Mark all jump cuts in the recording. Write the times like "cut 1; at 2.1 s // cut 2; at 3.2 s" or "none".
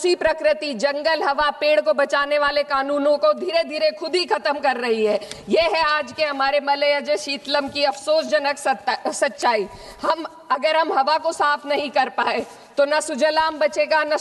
none